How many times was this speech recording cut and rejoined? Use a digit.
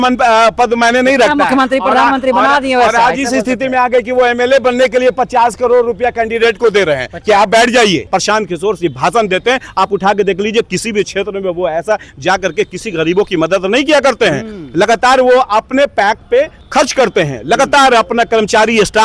2